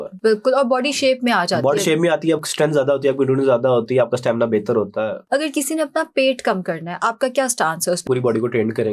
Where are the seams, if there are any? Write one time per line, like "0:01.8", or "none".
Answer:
0:05.2
0:08.0